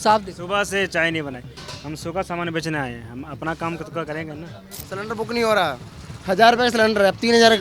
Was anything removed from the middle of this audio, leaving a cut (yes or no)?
yes